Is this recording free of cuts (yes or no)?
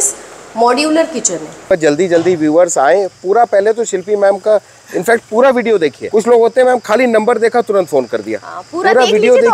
no